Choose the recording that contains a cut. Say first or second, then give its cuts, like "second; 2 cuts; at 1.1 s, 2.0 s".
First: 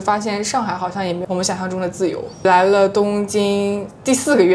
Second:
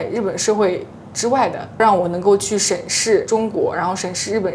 first; 2 cuts; at 1.2 s, 2.3 s